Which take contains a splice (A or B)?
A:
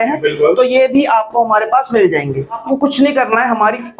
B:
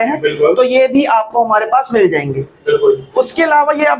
A